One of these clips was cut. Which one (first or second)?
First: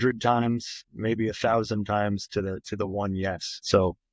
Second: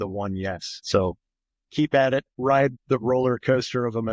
second